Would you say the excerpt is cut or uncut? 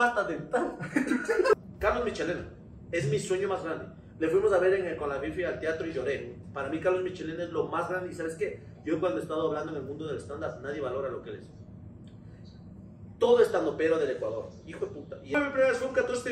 cut